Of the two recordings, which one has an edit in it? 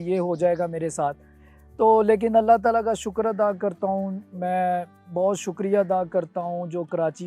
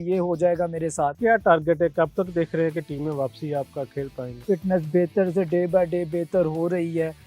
second; 2 cuts; at 1.2 s, 4.3 s

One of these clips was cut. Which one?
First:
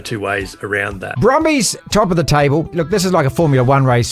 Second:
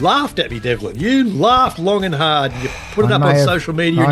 first; 3 cuts; at 1.1 s, 1.8 s, 2.7 s

